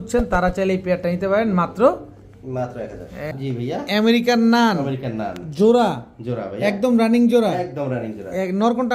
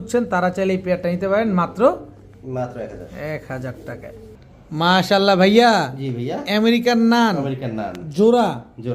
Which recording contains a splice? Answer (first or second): first